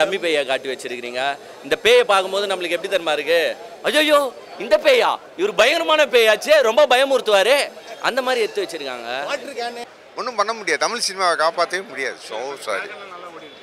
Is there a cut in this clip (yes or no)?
yes